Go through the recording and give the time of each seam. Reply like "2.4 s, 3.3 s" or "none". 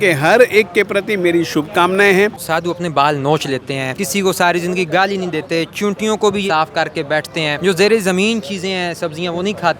2.4 s, 3.9 s, 6.4 s, 7.6 s